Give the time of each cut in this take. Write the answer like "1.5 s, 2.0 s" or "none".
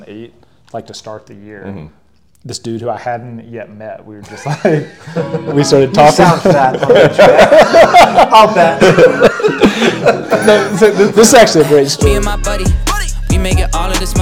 12.3 s